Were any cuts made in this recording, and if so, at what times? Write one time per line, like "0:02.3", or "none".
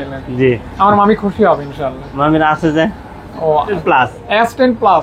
0:03.8